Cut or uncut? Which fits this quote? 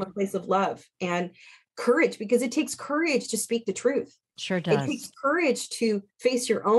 uncut